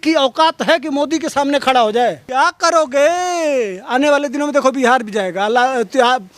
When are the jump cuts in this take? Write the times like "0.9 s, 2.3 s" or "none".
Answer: 2.2 s